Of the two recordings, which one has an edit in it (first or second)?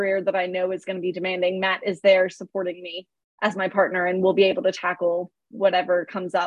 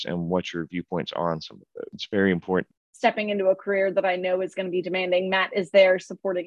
second